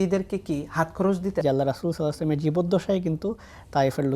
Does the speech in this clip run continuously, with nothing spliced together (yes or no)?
no